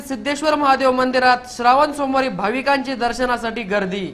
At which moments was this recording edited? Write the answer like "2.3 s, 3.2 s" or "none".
none